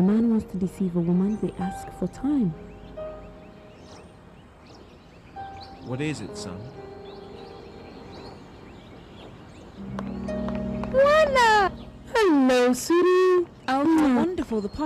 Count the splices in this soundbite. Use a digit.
0